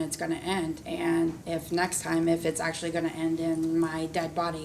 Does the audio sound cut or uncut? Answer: cut